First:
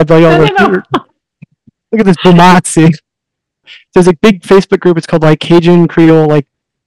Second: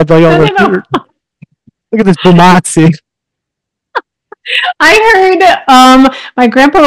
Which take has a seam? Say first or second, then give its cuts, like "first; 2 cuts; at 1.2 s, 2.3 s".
first; 1 cut; at 3.8 s